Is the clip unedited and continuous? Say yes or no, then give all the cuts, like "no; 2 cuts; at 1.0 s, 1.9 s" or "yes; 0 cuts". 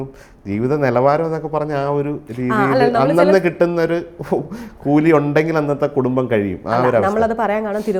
yes; 0 cuts